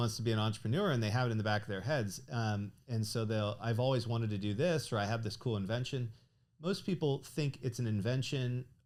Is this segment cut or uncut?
uncut